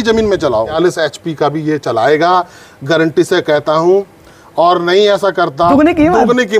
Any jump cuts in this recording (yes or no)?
yes